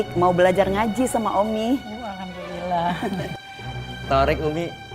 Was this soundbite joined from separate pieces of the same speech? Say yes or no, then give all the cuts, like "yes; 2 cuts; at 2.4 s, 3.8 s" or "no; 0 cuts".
no; 0 cuts